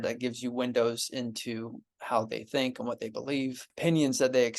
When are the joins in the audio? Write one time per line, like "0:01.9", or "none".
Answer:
0:03.7

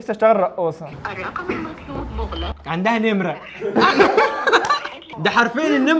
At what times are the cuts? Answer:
0:00.9

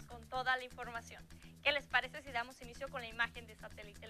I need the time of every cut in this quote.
none

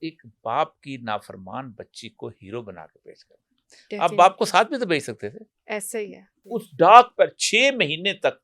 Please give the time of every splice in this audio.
0:06.3

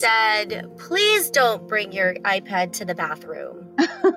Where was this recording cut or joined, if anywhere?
none

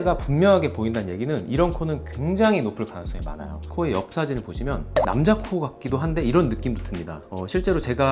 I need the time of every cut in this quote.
0:04.8

